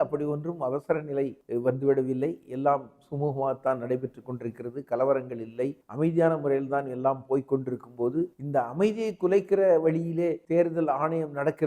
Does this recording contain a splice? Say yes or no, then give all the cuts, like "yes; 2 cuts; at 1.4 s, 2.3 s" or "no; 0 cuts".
yes; 4 cuts; at 1.4 s, 5.8 s, 8.4 s, 10.4 s